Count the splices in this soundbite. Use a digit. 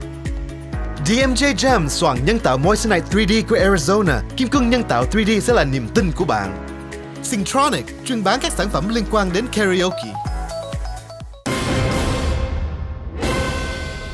1